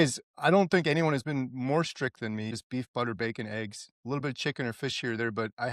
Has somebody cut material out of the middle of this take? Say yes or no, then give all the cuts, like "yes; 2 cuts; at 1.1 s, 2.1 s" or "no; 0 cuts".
yes; 1 cut; at 2.5 s